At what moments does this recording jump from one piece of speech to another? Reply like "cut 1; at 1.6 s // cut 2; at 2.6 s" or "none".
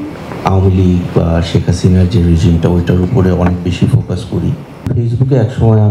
cut 1; at 4.9 s

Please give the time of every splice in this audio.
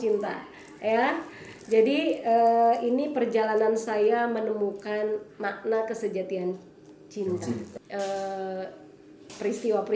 cut 1; at 7.8 s

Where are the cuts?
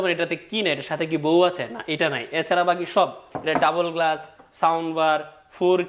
cut 1; at 3.3 s

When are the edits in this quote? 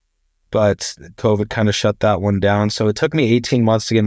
none

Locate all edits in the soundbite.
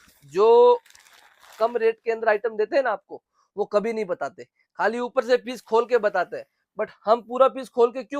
none

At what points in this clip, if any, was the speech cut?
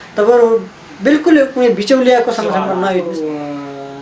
cut 1; at 2.9 s

